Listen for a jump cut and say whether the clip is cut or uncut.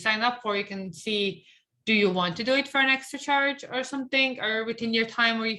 uncut